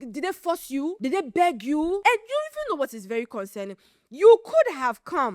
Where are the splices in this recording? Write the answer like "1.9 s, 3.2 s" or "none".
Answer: 1.0 s, 2.0 s